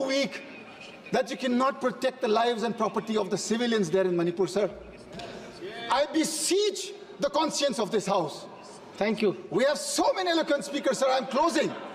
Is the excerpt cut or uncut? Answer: uncut